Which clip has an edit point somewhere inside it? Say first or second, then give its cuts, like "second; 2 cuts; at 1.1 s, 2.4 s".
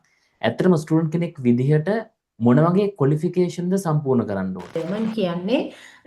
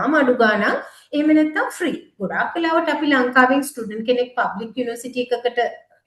first; 1 cut; at 4.8 s